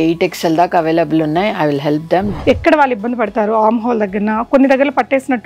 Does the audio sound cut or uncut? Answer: cut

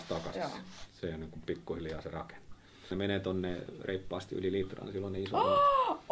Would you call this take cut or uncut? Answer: cut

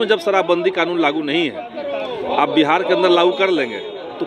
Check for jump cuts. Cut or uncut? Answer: uncut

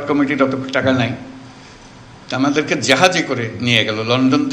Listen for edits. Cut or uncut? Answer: uncut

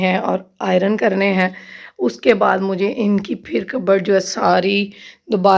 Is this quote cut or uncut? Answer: uncut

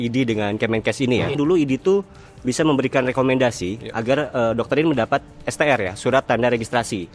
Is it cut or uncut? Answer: cut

